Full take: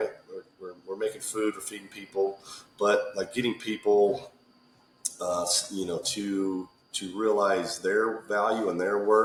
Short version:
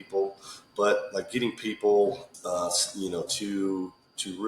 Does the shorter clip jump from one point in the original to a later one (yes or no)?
yes